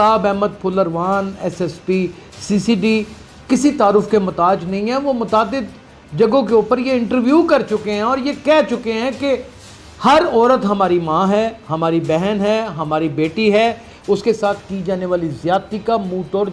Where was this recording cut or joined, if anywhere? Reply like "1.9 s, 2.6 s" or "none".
none